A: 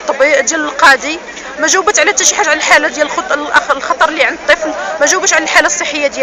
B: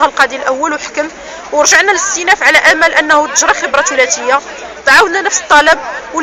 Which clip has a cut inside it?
A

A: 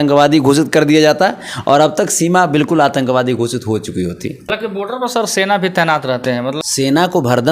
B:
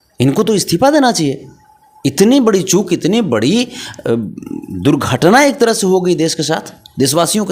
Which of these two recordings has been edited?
A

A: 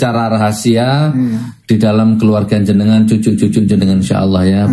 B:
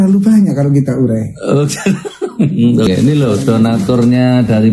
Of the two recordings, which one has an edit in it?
B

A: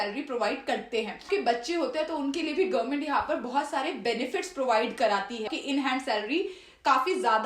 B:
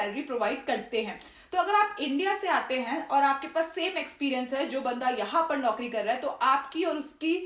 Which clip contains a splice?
A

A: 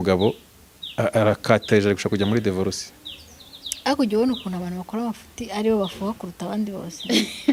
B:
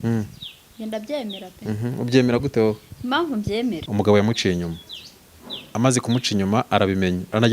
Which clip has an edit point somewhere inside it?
B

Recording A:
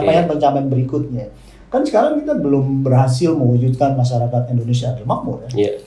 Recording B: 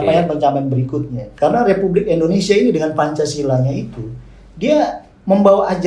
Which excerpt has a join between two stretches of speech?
B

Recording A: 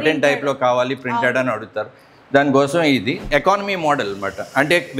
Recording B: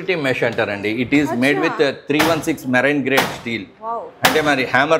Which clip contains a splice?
A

